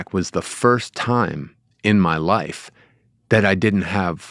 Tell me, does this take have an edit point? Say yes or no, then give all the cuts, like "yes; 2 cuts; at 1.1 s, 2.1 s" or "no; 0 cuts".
no; 0 cuts